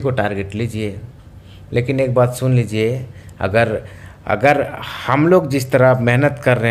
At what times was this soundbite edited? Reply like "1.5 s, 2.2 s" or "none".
none